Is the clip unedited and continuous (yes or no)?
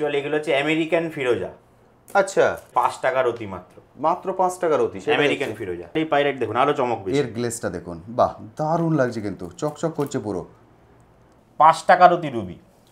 no